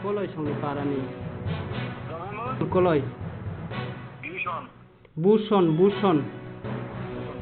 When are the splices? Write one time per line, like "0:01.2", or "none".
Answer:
0:06.3